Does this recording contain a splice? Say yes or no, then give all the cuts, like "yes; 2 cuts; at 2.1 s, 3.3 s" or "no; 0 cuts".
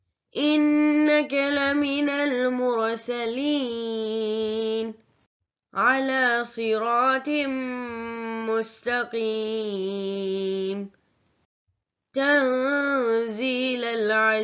no; 0 cuts